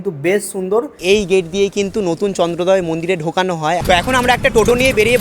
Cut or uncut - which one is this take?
cut